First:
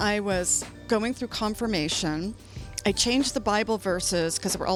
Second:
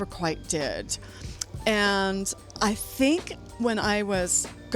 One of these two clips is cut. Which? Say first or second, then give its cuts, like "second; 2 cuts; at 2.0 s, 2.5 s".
second; 1 cut; at 2.4 s